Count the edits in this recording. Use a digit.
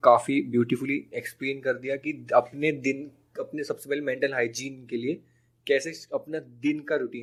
0